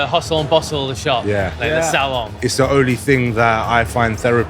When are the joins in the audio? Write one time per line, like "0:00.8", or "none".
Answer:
0:02.3